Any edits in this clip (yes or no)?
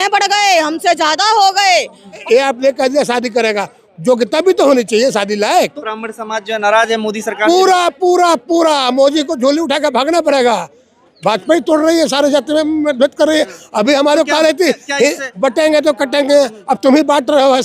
yes